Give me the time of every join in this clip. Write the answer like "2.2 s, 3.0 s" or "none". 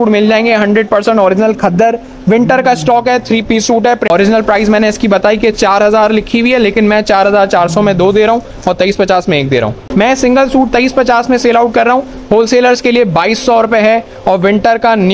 4.1 s, 9.8 s